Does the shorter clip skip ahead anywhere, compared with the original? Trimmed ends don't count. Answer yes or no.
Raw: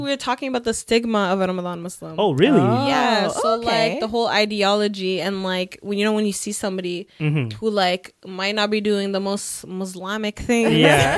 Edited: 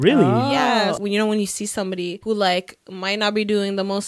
yes